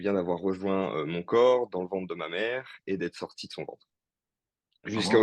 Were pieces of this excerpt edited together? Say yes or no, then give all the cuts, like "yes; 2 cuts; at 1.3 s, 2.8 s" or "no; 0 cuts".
no; 0 cuts